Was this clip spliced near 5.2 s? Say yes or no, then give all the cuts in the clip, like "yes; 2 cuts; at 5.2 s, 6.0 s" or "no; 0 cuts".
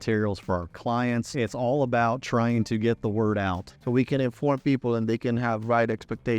no; 2 cuts; at 1.3 s, 3.7 s